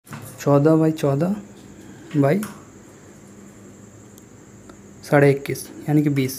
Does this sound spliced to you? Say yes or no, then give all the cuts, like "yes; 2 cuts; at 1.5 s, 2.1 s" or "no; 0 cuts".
no; 0 cuts